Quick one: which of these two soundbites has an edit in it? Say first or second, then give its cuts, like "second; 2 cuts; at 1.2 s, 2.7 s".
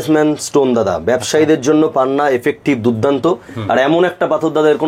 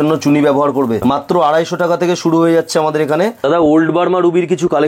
second; 2 cuts; at 1.0 s, 3.4 s